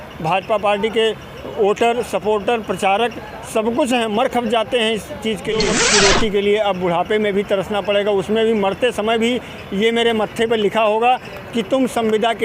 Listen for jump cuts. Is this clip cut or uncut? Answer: cut